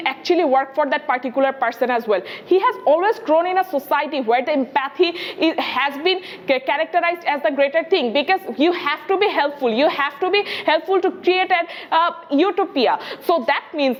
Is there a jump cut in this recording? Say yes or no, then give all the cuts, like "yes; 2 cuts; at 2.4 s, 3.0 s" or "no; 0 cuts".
no; 0 cuts